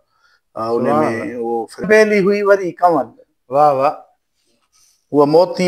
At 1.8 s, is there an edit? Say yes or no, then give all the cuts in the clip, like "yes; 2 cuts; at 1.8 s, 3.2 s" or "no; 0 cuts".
yes; 1 cut; at 1.8 s